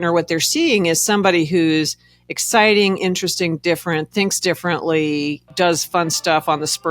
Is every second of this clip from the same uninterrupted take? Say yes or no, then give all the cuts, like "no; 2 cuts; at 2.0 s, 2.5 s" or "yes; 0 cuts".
no; 1 cut; at 5.5 s